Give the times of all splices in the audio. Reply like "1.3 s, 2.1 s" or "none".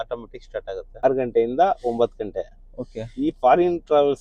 1.0 s